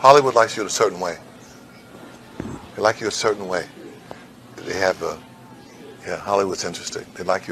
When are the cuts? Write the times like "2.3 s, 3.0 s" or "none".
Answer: none